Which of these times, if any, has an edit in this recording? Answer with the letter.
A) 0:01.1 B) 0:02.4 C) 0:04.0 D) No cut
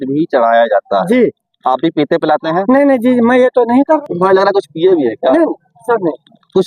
C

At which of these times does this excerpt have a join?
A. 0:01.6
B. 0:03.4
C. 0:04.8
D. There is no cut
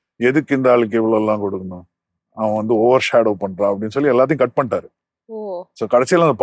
D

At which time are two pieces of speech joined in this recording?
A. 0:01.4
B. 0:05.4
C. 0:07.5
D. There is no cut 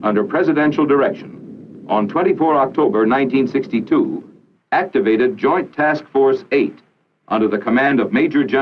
D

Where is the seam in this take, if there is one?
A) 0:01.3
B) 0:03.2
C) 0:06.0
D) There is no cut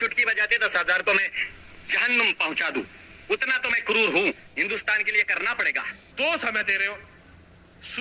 C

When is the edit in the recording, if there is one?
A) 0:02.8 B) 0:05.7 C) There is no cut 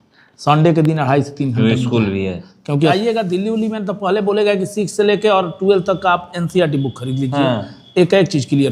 A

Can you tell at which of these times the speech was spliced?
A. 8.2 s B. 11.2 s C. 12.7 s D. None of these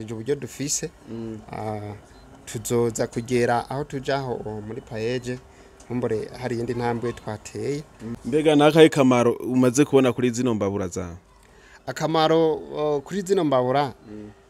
A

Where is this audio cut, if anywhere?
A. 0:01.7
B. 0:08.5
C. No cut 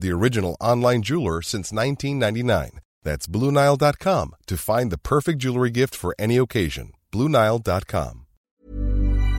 B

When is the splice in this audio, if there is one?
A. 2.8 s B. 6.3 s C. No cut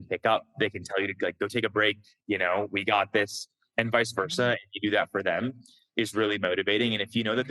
C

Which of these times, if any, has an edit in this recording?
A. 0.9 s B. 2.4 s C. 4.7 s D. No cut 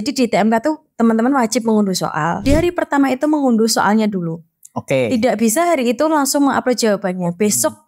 B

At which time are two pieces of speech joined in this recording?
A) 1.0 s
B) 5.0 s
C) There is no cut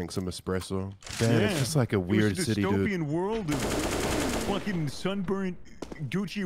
A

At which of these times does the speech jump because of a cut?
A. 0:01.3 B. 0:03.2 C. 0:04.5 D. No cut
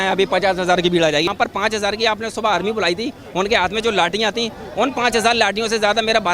A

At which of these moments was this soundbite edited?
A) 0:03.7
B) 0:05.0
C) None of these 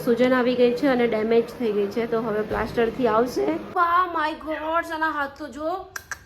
A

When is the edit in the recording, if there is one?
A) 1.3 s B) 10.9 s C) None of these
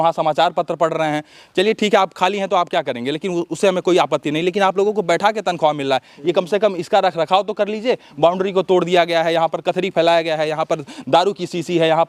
C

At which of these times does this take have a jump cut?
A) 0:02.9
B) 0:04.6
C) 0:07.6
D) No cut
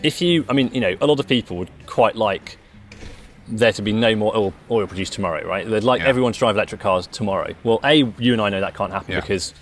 A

